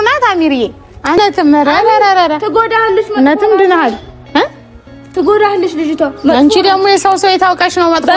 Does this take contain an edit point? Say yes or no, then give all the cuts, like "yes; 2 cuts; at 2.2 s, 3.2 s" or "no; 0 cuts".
yes; 1 cut; at 1.2 s